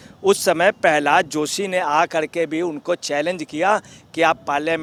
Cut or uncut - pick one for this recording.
uncut